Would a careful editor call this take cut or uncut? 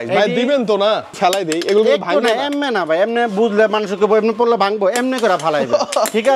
cut